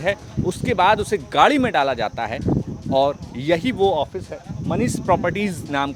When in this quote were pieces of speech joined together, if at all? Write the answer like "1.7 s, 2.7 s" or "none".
none